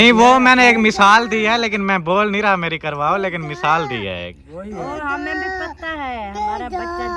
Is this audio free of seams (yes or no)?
yes